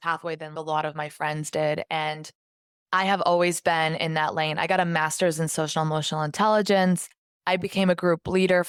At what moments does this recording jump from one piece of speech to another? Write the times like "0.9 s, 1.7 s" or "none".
none